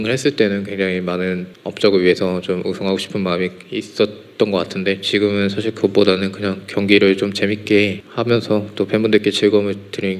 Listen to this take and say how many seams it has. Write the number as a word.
two